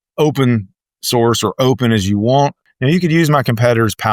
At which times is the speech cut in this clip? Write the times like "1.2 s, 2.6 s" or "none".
2.6 s

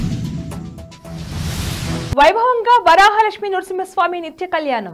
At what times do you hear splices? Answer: 1.7 s

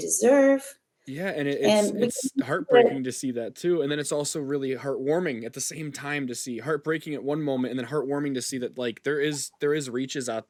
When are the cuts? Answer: none

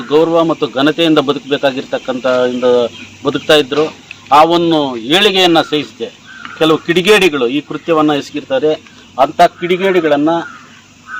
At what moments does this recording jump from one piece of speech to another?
none

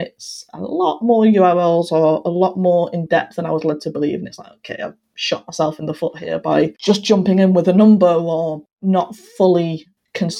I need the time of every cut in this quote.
6.8 s, 8.7 s

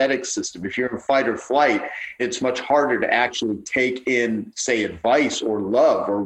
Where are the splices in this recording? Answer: 2.2 s

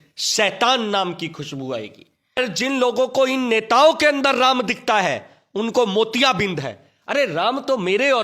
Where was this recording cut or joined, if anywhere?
2.4 s

